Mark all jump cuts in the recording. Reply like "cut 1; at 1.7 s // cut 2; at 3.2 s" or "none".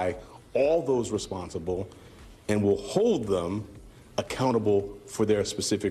none